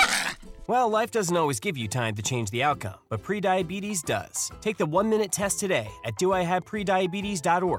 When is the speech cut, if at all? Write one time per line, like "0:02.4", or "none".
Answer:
none